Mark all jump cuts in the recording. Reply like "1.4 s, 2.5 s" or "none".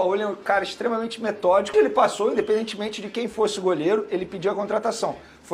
1.7 s